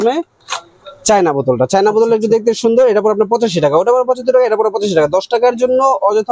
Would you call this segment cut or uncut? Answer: uncut